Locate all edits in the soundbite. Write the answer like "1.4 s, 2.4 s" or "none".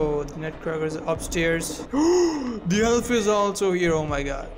1.8 s